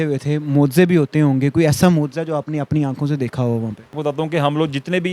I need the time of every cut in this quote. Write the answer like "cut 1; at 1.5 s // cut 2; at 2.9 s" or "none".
cut 1; at 4.0 s